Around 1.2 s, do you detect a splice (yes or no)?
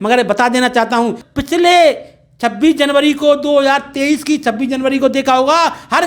yes